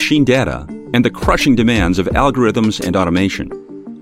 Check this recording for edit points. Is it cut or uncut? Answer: uncut